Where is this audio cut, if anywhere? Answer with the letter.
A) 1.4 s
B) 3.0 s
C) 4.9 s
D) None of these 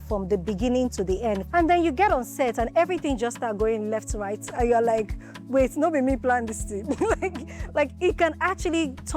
A